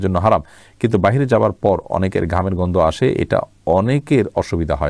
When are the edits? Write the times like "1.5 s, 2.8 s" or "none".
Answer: none